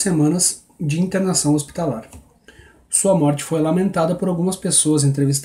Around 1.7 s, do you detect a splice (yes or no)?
yes